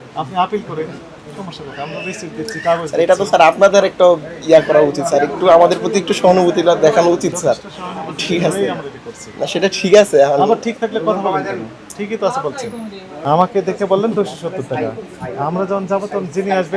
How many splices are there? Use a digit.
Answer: 1